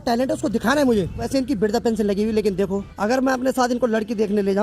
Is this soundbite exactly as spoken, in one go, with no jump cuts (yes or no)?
no